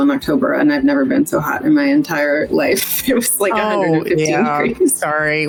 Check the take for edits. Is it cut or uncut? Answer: uncut